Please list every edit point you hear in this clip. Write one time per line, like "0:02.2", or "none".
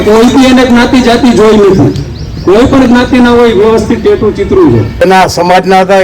0:04.9